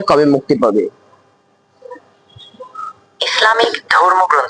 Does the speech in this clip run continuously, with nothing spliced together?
yes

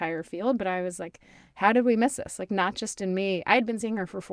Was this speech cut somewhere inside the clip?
no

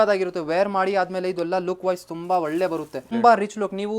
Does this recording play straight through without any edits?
no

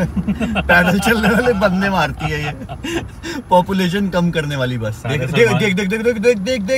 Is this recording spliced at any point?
no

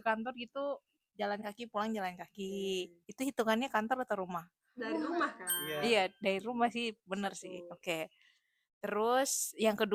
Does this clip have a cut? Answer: no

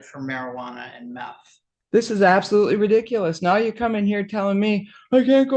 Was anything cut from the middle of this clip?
yes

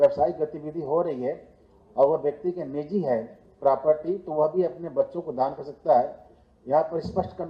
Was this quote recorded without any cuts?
yes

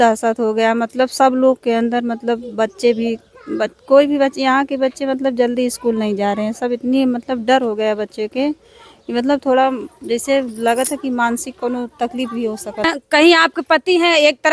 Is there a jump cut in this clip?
yes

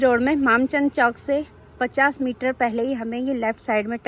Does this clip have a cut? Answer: no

